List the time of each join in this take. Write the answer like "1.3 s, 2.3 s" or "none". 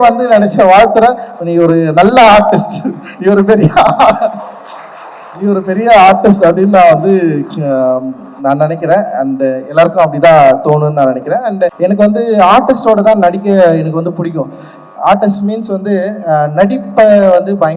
11.7 s